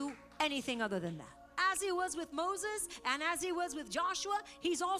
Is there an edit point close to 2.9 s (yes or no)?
no